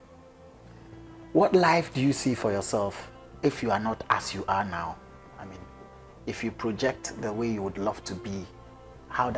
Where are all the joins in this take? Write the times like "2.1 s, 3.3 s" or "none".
none